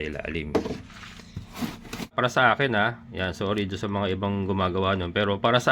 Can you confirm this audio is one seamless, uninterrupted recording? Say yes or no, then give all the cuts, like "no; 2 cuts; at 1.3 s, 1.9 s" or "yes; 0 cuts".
no; 1 cut; at 2.1 s